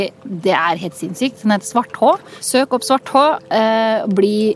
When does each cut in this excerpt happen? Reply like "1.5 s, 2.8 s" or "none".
2.3 s